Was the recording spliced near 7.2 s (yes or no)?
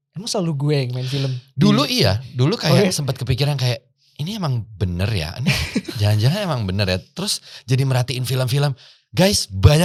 no